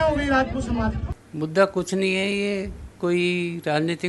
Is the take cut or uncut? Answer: uncut